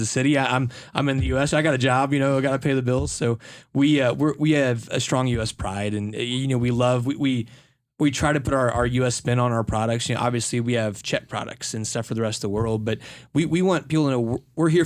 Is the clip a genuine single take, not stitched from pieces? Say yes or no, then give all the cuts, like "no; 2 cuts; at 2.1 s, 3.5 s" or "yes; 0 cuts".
yes; 0 cuts